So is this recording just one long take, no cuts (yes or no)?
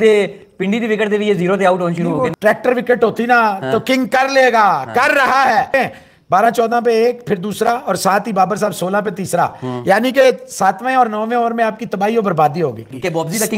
yes